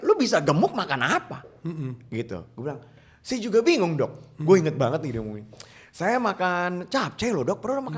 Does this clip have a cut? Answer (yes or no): no